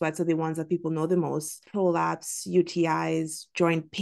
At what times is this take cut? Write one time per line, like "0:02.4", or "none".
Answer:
0:01.6